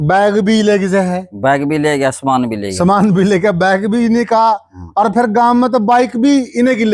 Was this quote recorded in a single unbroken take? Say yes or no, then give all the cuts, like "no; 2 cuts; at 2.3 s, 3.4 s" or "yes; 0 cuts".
yes; 0 cuts